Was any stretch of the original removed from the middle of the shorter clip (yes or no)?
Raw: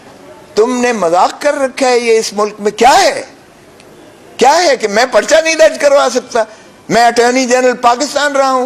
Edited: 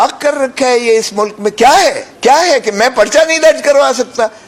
yes